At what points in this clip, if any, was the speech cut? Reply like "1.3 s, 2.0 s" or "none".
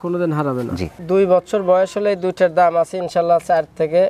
1.0 s